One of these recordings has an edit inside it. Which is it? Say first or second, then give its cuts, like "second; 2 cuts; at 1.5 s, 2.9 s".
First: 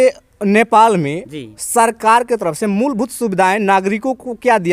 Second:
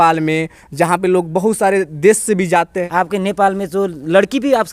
second; 1 cut; at 2.8 s